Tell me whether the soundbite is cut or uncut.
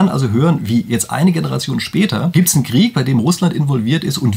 cut